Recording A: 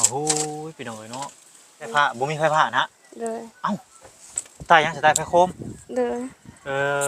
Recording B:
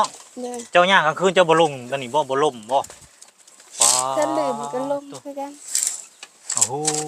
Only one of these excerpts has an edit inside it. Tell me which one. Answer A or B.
A